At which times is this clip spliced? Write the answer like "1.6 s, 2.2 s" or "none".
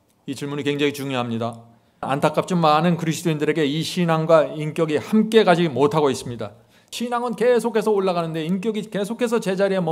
2.1 s, 6.9 s